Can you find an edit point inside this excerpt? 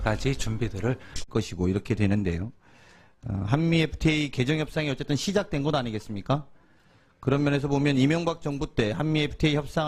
no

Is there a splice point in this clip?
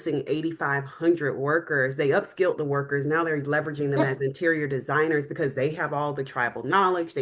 no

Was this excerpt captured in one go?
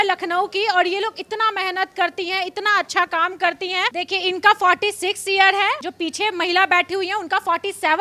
yes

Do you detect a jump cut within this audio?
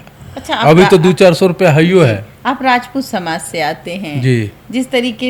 no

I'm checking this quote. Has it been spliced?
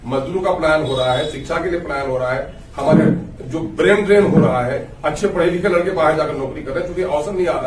no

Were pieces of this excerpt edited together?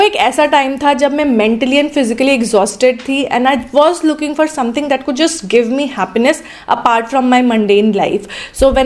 no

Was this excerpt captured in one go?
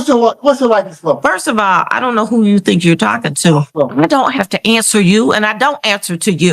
no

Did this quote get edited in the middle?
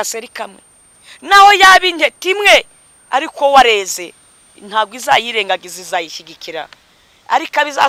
no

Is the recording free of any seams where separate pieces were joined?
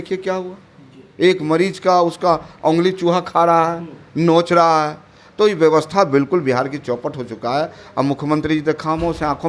yes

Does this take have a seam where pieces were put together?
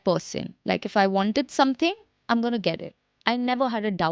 no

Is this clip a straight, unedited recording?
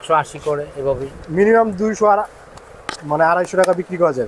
yes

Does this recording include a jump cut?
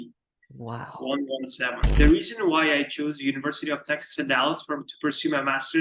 yes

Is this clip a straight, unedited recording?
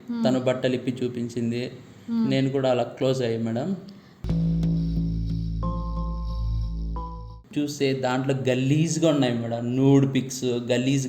no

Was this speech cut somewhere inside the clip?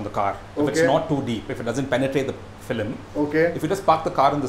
no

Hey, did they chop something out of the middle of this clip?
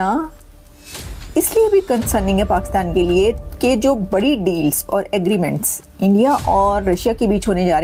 no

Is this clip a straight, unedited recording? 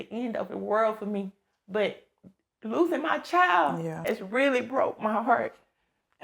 no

